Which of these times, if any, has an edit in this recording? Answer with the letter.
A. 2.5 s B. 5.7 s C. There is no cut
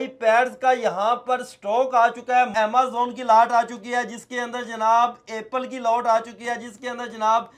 A